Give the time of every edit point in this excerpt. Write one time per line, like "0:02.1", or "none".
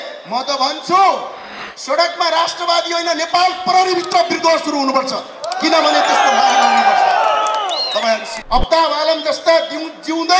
0:08.3